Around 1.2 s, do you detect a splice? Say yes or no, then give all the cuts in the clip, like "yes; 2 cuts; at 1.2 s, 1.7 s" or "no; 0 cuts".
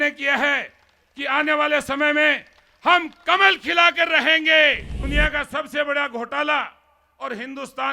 no; 1 cut; at 4.9 s